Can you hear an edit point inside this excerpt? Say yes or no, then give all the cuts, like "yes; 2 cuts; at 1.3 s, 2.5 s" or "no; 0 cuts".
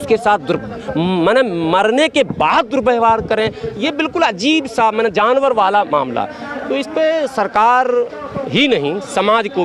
no; 0 cuts